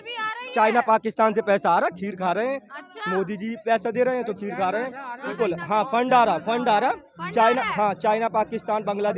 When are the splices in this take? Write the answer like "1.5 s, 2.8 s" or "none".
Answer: 5.3 s